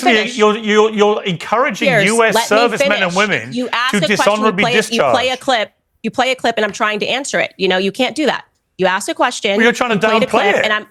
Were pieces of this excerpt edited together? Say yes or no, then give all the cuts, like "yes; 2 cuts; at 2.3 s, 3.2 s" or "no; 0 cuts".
no; 0 cuts